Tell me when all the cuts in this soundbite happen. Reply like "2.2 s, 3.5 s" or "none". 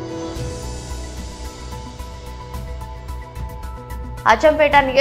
none